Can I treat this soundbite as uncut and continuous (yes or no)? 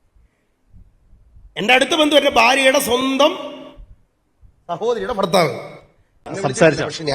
no